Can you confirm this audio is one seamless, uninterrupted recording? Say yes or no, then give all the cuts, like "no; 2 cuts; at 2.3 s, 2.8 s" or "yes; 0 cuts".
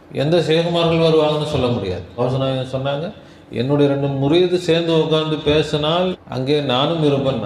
no; 2 cuts; at 2.1 s, 6.3 s